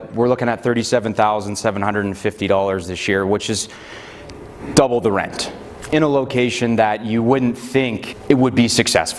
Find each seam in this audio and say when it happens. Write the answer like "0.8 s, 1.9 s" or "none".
5.9 s, 8.1 s